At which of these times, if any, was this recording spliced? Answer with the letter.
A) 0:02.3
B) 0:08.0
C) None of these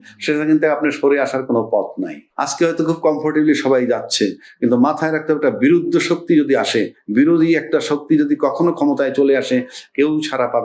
A